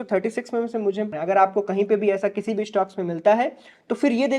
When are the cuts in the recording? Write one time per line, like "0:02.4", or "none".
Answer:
0:01.3